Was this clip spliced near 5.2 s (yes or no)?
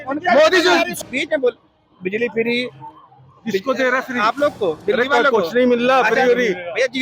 no